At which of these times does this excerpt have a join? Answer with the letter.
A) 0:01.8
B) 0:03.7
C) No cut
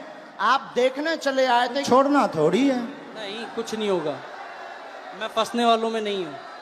A